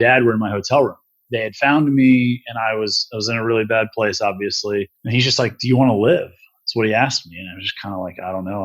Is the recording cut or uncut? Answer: cut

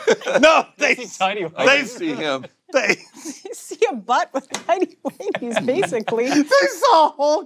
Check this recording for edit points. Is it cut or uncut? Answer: uncut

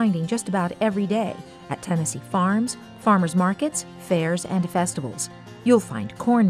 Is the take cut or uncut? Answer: uncut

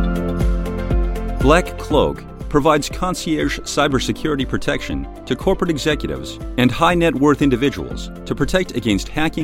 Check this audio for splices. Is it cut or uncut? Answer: cut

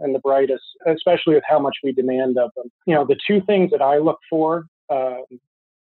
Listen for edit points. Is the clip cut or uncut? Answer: cut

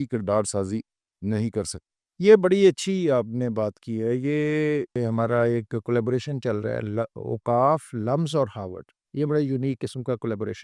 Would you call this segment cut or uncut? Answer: cut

